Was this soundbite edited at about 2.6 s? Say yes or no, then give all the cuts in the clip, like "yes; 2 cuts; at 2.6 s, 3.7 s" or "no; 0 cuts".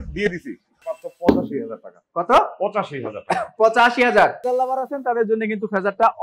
no; 2 cuts; at 0.9 s, 4.4 s